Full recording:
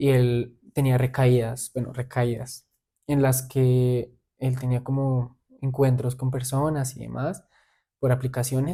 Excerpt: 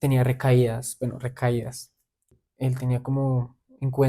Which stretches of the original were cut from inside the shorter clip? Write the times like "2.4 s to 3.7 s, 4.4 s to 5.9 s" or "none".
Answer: 3.0 s to 4.1 s